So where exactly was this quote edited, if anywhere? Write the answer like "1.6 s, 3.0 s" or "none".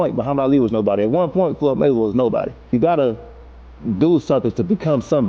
2.7 s

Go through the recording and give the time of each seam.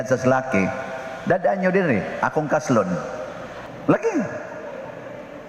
3.7 s

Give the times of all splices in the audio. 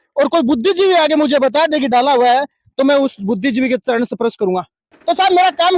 4.9 s

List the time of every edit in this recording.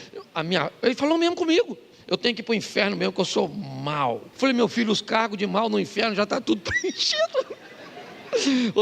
4.3 s

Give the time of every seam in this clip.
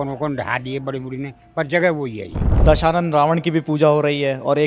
2.5 s

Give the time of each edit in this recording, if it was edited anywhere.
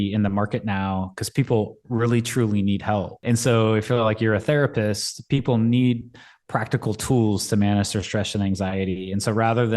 3.2 s

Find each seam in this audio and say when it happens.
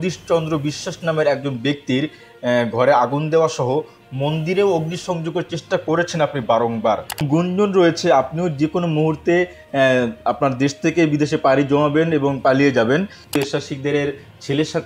7.2 s, 13.4 s

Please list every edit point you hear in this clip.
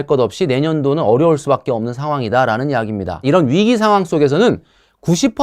3.3 s

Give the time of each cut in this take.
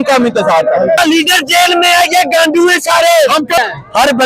1.0 s, 3.6 s

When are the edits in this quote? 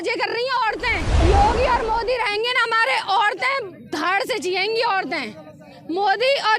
1.1 s

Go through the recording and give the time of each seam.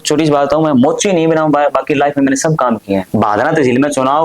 3.1 s

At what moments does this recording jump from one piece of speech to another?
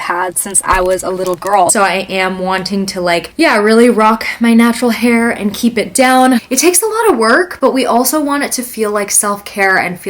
1.7 s, 6.4 s

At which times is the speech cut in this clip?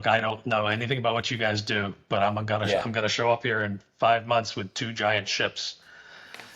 none

